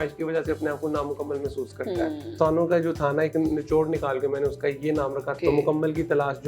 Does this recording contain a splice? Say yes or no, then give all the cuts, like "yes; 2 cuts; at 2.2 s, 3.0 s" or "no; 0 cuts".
yes; 2 cuts; at 2.3 s, 5.3 s